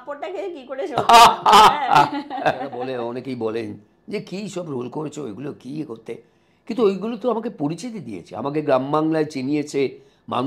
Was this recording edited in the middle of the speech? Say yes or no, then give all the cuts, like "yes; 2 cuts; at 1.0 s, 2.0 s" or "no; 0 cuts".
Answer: yes; 1 cut; at 2.9 s